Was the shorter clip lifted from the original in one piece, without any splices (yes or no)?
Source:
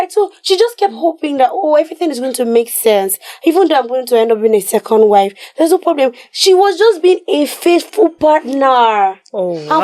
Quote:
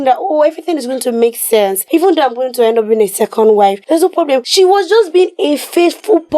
no